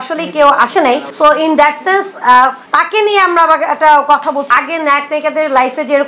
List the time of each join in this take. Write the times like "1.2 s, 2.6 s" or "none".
4.5 s